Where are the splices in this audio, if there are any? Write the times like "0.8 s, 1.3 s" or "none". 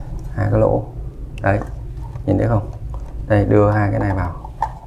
none